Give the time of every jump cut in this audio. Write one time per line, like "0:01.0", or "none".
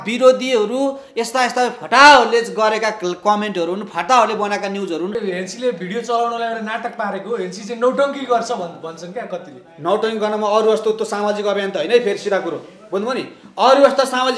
0:05.2